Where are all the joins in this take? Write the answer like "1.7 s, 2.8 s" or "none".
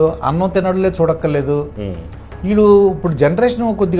none